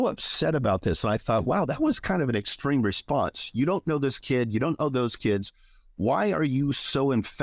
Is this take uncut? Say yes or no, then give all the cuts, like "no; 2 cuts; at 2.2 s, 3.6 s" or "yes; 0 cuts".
yes; 0 cuts